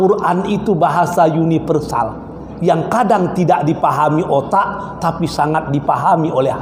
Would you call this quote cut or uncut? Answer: uncut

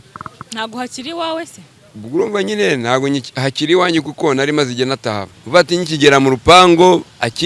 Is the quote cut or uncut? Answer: cut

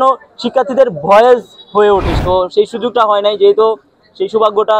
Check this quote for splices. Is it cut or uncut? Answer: cut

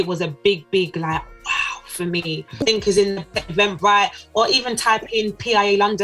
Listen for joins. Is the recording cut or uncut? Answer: cut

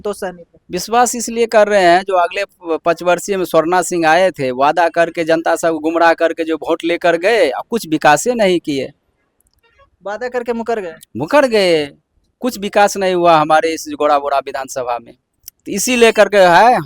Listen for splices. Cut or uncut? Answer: uncut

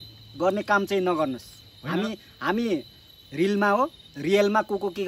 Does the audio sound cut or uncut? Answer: uncut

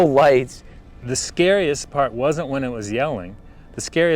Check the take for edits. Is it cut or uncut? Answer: cut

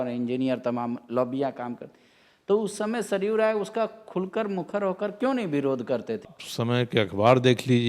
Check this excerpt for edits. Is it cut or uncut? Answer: cut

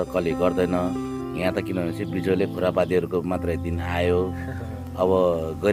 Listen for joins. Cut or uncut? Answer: uncut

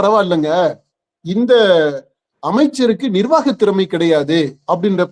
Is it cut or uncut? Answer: uncut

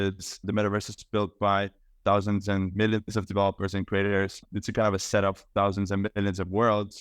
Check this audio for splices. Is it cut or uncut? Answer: cut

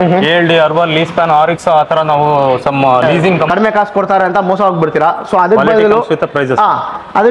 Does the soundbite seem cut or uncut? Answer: cut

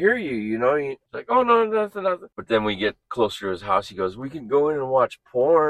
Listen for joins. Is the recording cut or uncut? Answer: cut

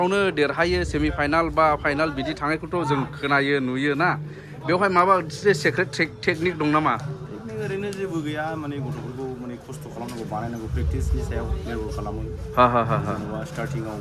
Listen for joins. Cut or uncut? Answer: uncut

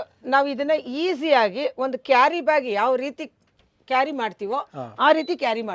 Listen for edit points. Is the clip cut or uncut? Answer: uncut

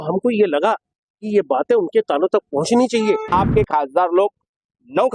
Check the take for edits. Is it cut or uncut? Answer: cut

